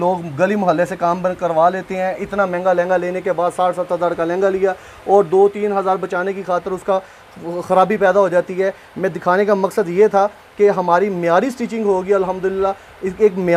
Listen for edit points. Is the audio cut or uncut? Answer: uncut